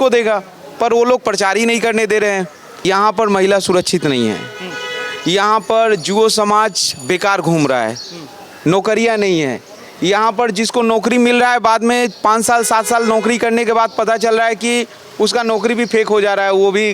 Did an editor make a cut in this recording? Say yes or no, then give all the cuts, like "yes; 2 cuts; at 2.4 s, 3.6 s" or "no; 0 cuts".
yes; 1 cut; at 2.9 s